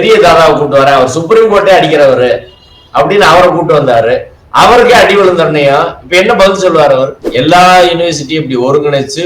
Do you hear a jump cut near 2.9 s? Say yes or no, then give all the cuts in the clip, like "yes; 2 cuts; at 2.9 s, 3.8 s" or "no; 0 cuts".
no; 1 cut; at 7.2 s